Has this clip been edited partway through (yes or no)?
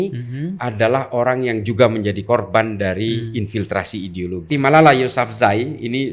yes